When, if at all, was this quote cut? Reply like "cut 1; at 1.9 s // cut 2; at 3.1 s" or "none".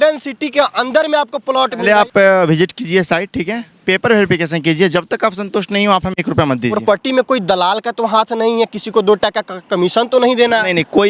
cut 1; at 1.8 s // cut 2; at 6.8 s